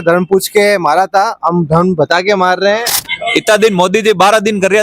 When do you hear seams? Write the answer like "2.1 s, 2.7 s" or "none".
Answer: 2.9 s